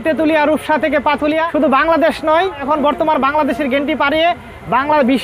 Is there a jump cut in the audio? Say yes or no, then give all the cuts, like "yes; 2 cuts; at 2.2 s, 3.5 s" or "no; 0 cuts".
yes; 2 cuts; at 1.5 s, 2.6 s